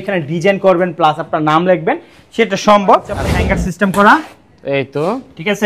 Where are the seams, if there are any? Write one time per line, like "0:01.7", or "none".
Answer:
0:03.2